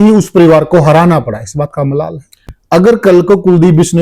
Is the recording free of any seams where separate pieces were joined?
no; 1 cut; at 2.6 s

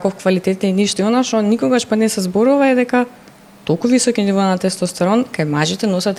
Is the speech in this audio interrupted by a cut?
no; 0 cuts

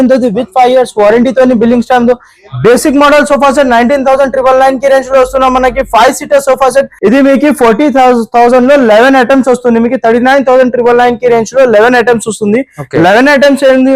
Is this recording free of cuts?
no; 1 cut; at 6.9 s

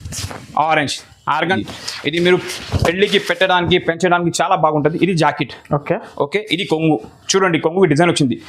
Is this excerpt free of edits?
no; 1 cut; at 1.5 s

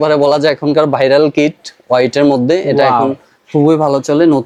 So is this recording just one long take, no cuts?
yes; 0 cuts

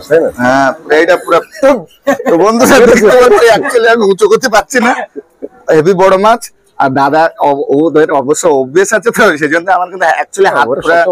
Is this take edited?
yes; 1 cut; at 1.5 s

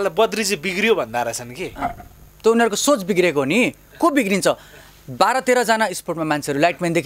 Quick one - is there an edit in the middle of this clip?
no; 0 cuts

